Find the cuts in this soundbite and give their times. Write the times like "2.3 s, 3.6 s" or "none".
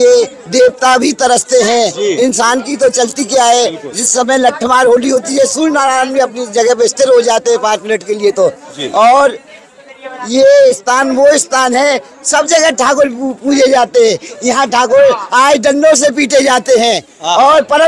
none